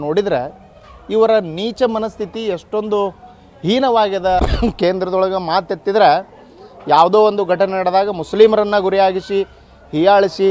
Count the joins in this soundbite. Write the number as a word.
one